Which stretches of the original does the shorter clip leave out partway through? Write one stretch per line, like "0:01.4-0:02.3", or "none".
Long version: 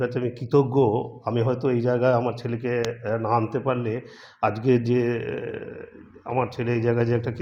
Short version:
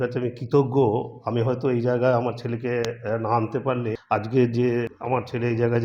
0:04.0-0:04.3
0:05.2-0:06.2